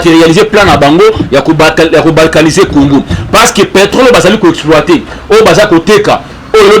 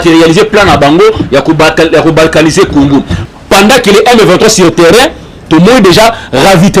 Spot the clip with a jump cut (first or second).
second